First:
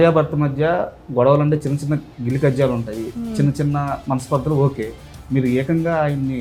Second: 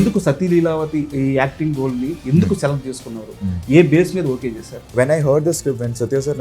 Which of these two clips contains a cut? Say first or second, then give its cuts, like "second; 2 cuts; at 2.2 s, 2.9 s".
second; 2 cuts; at 1.1 s, 4.9 s